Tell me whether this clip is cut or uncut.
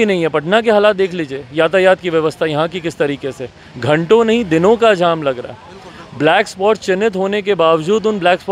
uncut